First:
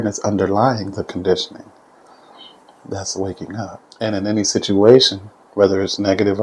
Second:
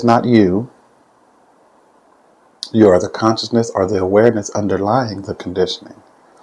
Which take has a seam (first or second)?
first